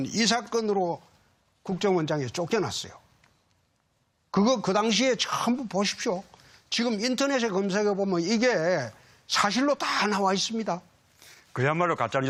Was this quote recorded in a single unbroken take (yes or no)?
yes